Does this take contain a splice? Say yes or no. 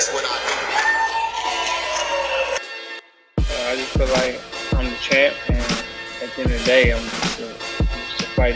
no